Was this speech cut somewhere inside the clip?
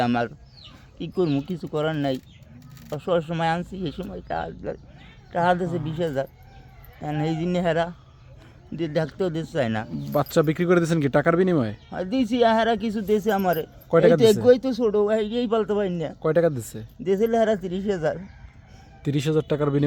no; 0 cuts

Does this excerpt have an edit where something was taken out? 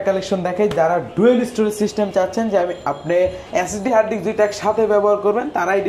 no; 0 cuts

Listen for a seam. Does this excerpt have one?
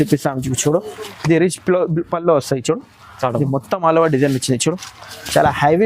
no; 0 cuts

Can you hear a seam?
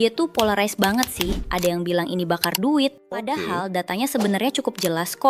yes; 2 cuts; at 1.4 s, 3.3 s

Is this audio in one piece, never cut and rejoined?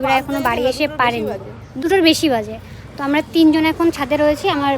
yes; 0 cuts

